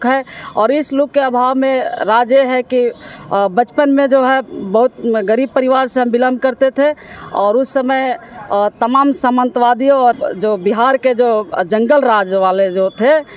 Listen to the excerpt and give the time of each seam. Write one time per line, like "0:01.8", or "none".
none

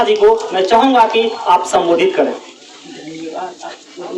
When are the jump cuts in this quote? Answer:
0:02.5

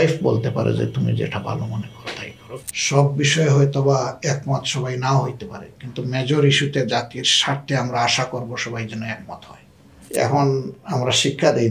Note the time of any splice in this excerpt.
0:02.7
0:10.0

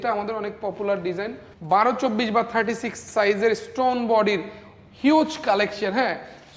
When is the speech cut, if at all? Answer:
0:01.5

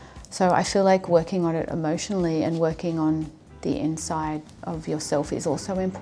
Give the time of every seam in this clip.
0:04.5

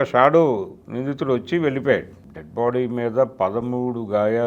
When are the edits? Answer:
none

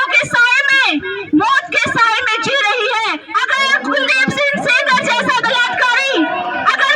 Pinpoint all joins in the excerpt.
0:03.2

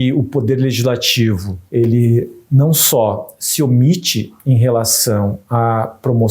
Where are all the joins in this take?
0:01.5

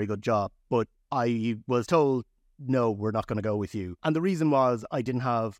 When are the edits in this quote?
0:01.0
0:04.0

